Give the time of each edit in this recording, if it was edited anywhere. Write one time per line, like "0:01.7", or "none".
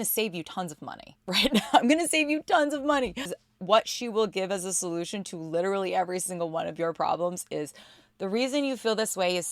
0:03.4